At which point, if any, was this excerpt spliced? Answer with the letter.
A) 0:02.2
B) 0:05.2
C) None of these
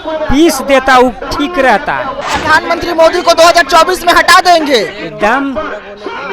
A